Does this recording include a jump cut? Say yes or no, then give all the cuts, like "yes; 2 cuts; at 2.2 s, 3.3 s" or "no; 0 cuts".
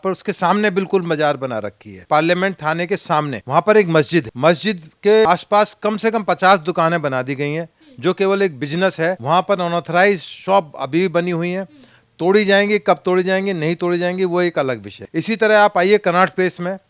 yes; 6 cuts; at 2.0 s, 3.4 s, 4.3 s, 5.3 s, 9.2 s, 14.9 s